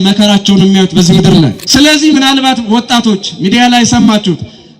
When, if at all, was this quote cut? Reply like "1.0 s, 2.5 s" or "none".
1.6 s